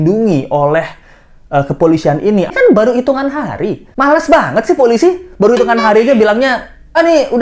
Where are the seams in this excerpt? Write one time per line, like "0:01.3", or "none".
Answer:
0:02.5